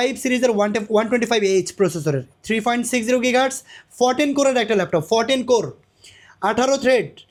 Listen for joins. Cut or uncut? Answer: uncut